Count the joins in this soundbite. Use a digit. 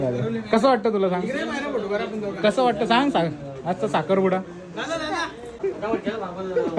1